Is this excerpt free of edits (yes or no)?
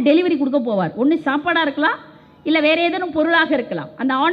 yes